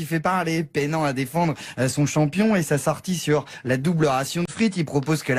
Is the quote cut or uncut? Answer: uncut